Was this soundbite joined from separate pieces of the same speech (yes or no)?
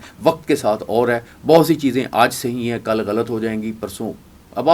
no